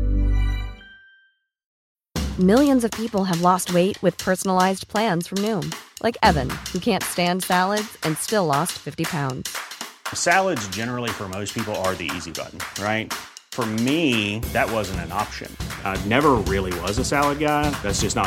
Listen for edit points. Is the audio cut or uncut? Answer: cut